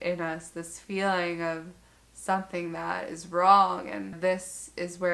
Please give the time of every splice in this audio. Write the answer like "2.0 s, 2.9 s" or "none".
4.2 s